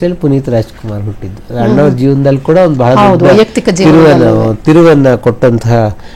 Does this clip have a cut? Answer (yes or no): no